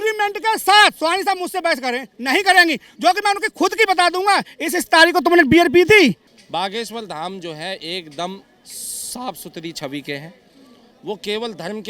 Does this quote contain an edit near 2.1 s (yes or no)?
no